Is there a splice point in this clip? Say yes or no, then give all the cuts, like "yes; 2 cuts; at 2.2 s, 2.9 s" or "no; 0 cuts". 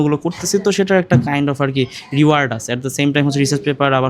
no; 0 cuts